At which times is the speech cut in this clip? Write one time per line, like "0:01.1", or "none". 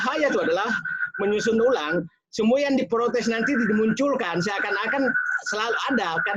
none